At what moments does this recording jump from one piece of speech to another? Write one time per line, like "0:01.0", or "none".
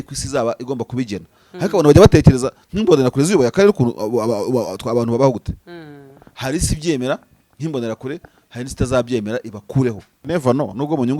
0:10.3